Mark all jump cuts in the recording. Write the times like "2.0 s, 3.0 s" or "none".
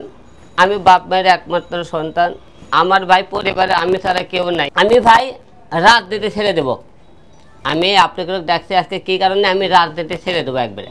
4.7 s